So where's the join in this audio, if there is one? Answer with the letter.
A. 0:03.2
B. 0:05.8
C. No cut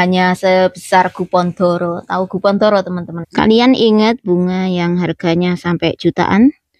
A